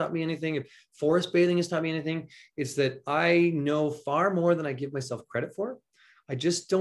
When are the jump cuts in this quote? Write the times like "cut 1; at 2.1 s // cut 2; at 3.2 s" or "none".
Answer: none